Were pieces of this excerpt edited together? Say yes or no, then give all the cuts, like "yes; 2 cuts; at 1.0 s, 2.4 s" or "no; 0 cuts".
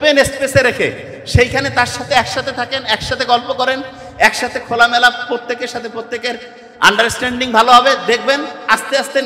no; 0 cuts